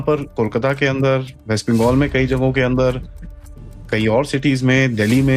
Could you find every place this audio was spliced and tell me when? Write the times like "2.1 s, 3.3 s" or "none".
none